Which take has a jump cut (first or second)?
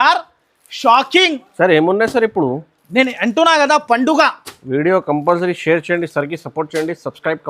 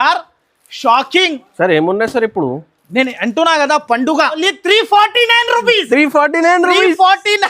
second